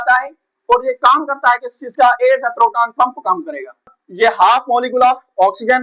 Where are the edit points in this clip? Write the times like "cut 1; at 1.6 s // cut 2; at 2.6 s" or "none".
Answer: cut 1; at 3.9 s